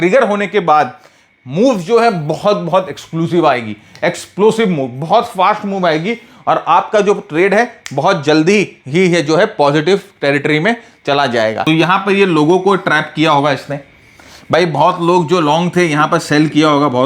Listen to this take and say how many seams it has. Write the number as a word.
one